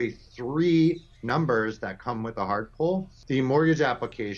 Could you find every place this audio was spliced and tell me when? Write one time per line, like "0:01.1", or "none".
0:03.1